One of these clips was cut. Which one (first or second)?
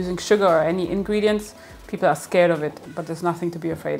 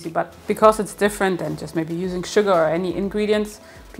first